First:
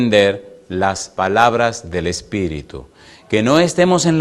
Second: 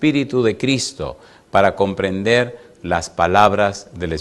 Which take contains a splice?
first; 1 cut; at 2.3 s

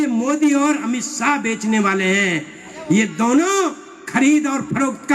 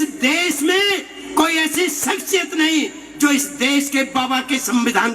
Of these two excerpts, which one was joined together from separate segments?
second; 1 cut; at 1.2 s

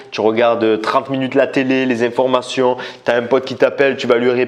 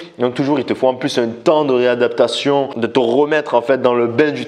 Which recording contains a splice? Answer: second; 1 cut; at 2.8 s

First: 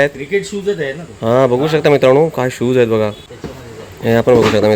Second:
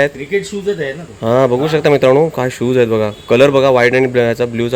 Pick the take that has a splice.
first; 1 cut; at 3.2 s

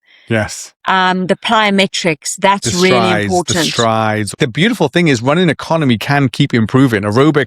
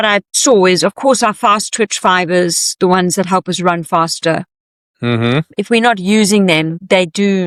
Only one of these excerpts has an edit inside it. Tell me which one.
first; 1 cut; at 4.3 s

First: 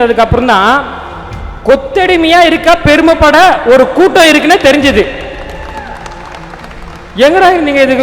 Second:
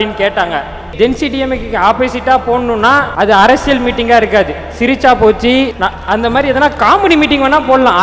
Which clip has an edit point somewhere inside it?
second; 3 cuts; at 0.9 s, 3.1 s, 5.7 s

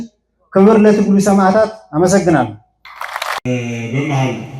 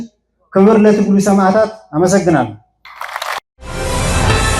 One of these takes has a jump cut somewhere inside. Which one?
first; 1 cut; at 3.4 s

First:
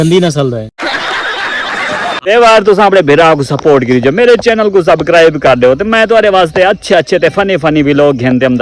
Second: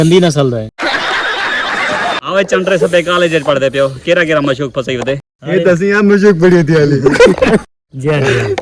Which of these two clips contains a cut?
first; 1 cut; at 2.2 s

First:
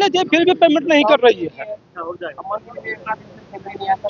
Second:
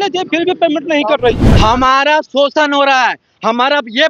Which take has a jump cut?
second; 1 cut; at 1.5 s

